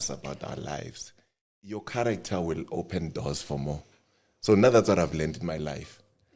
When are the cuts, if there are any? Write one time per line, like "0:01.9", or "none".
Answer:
0:01.5